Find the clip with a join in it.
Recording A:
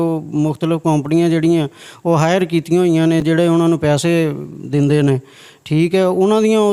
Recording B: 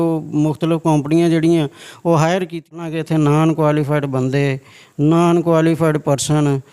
B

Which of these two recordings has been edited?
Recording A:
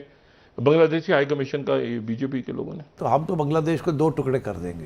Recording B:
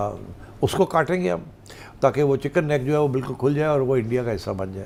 A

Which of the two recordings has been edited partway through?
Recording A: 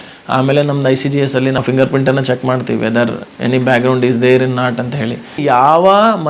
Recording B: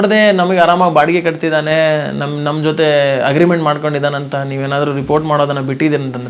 A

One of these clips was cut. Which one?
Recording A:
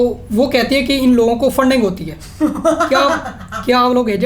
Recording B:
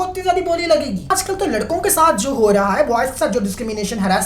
B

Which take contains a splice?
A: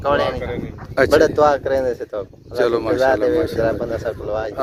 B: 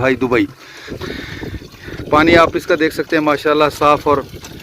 B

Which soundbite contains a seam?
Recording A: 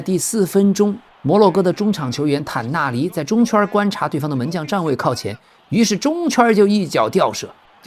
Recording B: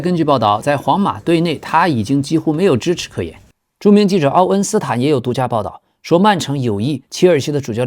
B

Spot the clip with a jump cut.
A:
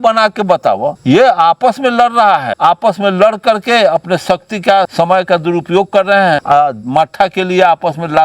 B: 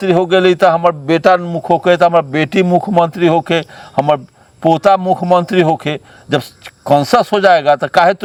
A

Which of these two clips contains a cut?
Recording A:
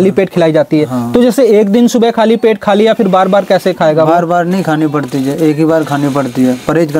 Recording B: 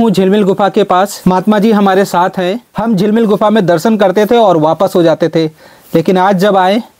B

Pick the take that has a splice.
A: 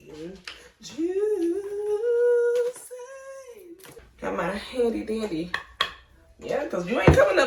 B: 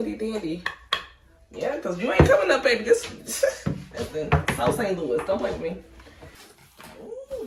B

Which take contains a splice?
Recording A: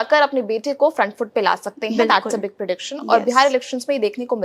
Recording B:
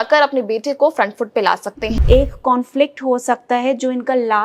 B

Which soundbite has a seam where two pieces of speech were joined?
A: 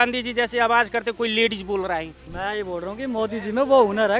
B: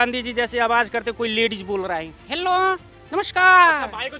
A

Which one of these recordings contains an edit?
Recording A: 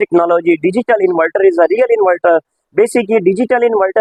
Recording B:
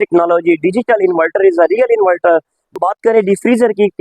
B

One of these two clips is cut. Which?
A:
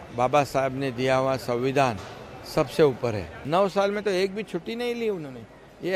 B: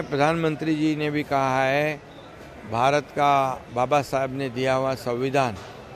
A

